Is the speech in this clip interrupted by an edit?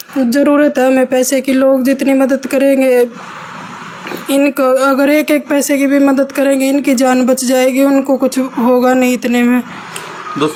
no; 0 cuts

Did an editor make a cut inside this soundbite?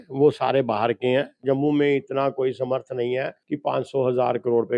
yes; 1 cut; at 1.3 s

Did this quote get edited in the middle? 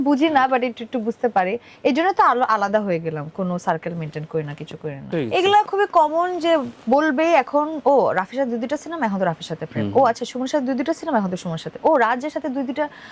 yes; 1 cut; at 5.1 s

